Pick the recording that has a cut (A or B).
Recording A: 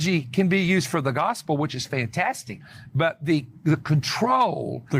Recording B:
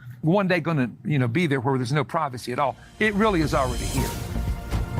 B